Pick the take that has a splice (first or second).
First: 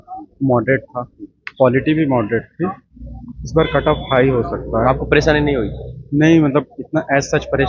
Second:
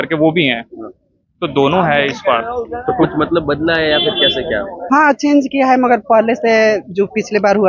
second